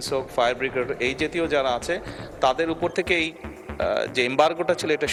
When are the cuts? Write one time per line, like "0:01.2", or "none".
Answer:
none

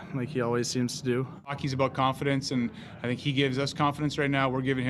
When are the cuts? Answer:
0:01.6

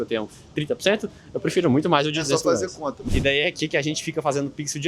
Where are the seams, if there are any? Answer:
0:03.0

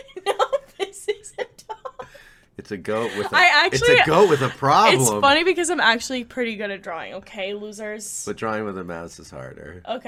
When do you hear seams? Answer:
none

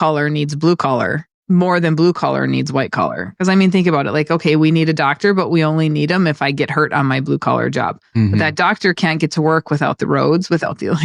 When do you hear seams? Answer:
0:01.3

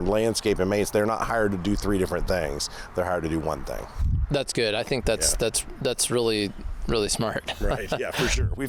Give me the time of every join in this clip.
none

